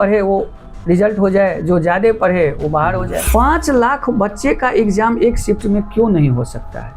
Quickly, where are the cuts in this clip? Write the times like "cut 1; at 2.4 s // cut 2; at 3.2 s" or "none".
cut 1; at 3.2 s